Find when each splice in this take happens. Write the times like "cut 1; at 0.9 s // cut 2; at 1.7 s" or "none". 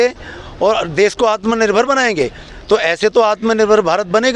cut 1; at 2.4 s